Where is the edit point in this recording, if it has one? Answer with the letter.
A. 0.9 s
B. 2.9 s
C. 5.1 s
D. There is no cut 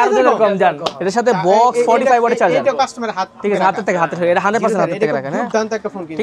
A